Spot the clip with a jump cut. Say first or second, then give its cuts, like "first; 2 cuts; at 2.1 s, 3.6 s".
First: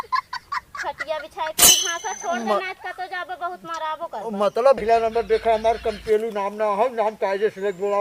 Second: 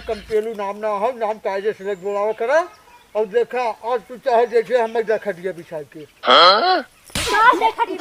first; 1 cut; at 4.8 s